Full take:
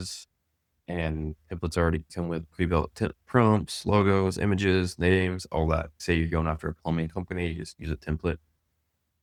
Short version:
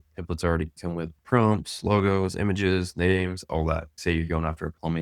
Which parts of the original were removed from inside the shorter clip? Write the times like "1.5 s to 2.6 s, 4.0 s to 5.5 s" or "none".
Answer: 2.5 s to 3.2 s